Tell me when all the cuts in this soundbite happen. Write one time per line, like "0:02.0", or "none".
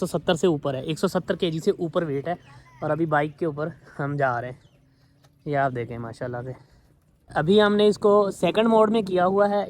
0:07.3